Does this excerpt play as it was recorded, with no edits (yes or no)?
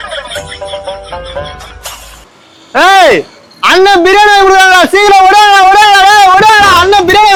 yes